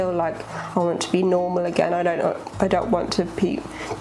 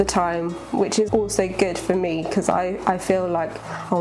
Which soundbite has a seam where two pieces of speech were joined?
second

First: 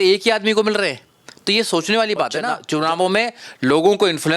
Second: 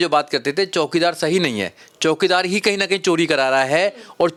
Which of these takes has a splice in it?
first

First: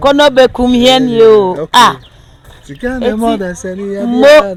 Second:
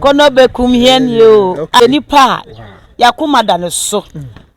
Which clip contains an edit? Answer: second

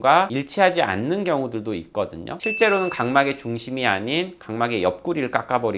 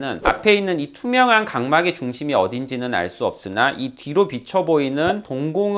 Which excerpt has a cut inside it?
first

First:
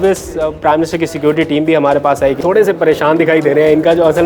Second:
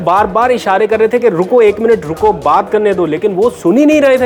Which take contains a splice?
first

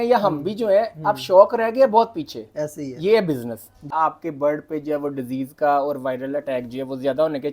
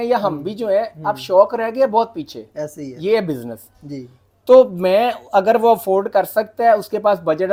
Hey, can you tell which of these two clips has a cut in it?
first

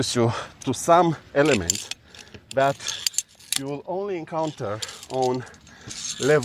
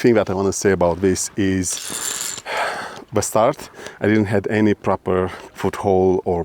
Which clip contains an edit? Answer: second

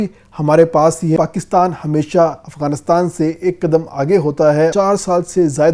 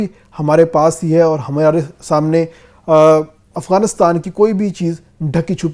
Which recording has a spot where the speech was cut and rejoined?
first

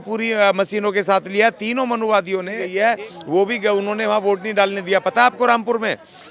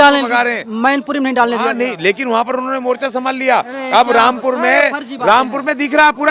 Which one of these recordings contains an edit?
first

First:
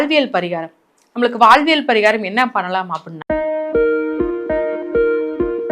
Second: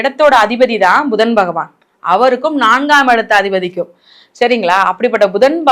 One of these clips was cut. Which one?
first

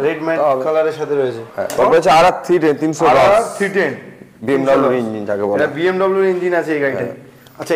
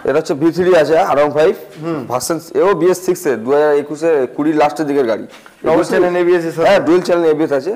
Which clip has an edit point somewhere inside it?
first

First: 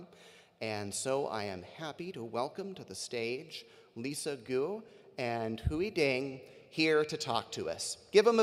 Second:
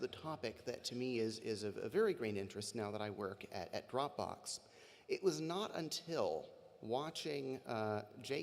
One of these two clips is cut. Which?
second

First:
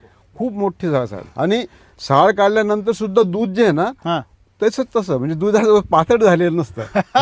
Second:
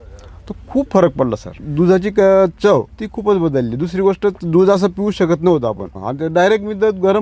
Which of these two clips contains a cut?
second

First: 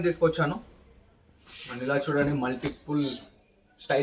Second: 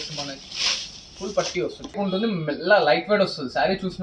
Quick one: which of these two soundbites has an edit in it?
second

